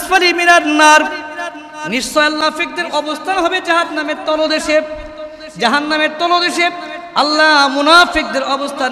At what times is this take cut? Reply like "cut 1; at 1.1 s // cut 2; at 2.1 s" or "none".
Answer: cut 1; at 2.4 s

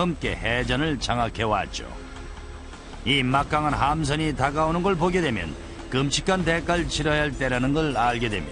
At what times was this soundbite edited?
none

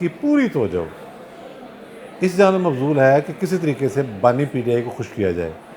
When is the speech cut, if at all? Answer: none

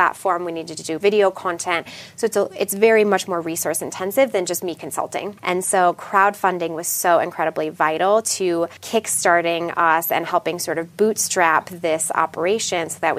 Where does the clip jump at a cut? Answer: cut 1; at 1.0 s // cut 2; at 5.3 s // cut 3; at 8.8 s

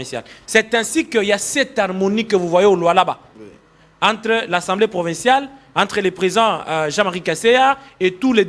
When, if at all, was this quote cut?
none

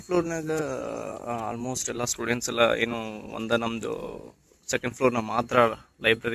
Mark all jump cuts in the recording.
none

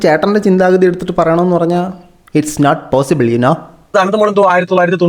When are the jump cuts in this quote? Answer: cut 1; at 3.9 s

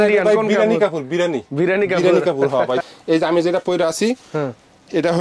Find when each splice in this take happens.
cut 1; at 2.8 s

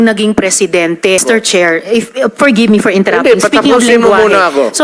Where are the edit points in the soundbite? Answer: cut 1; at 1.2 s

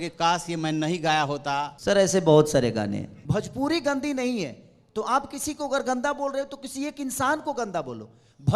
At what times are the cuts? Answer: cut 1; at 1.7 s // cut 2; at 3.1 s

